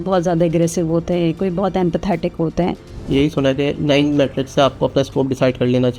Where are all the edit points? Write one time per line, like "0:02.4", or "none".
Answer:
0:02.9